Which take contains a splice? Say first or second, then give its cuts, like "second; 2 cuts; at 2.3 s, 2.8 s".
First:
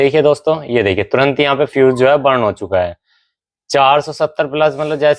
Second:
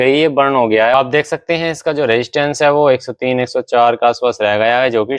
second; 1 cut; at 0.9 s